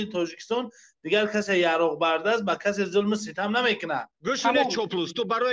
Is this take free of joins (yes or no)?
no